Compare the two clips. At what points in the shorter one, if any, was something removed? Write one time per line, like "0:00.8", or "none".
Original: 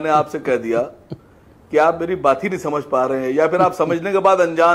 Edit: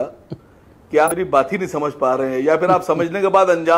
0:01.1

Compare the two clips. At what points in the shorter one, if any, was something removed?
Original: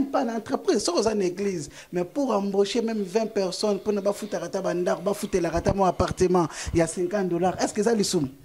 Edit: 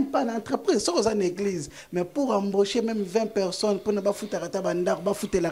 none

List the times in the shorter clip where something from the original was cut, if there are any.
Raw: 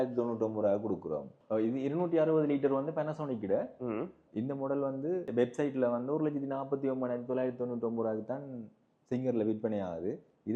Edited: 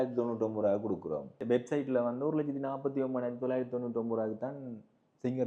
0:01.4

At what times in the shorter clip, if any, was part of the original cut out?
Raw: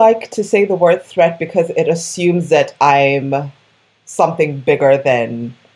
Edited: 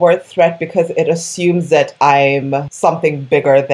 0:02.7

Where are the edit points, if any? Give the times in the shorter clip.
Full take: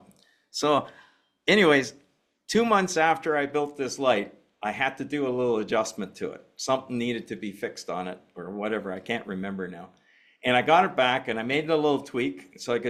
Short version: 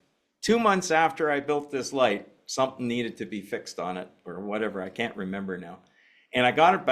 0:02.4

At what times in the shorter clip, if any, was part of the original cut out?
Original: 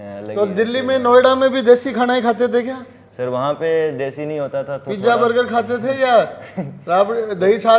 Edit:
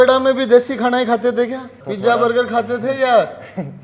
0:01.8

